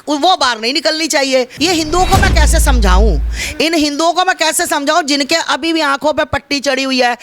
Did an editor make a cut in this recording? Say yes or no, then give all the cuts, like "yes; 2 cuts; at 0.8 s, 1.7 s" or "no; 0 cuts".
yes; 1 cut; at 1.5 s